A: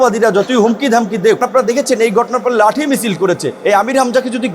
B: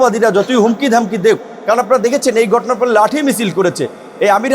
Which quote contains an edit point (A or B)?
A